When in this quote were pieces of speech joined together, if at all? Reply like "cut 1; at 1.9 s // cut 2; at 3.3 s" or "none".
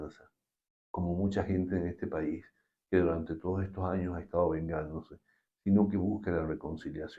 none

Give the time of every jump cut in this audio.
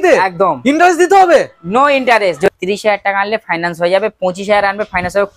cut 1; at 2.5 s

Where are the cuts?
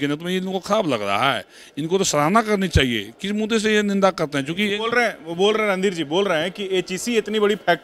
none

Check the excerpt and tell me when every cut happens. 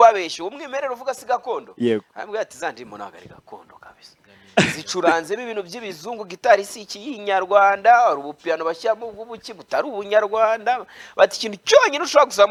none

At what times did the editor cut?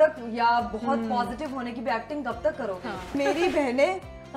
cut 1; at 3.2 s

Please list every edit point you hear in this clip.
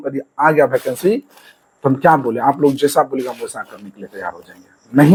none

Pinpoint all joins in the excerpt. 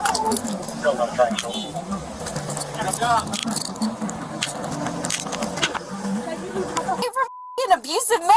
cut 1; at 7.1 s

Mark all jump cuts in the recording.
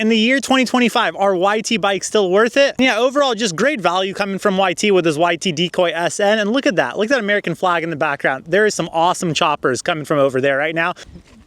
none

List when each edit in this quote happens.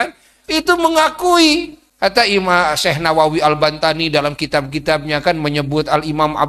cut 1; at 1.8 s

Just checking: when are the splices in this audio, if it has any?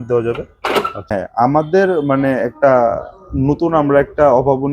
cut 1; at 1.0 s

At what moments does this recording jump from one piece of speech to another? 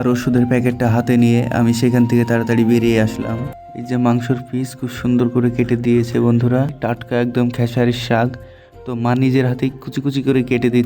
cut 1; at 3.6 s // cut 2; at 6.8 s

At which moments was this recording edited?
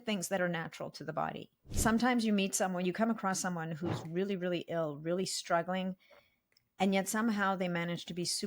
cut 1; at 1.7 s

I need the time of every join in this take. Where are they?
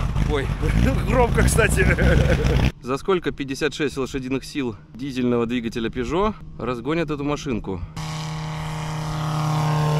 cut 1; at 2.7 s // cut 2; at 4.9 s // cut 3; at 6.5 s // cut 4; at 8.0 s

